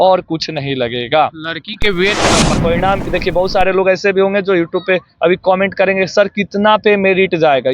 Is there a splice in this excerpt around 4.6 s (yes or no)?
no